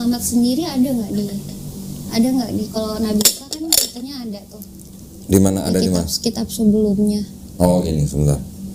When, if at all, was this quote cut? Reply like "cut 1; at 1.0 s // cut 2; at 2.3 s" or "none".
none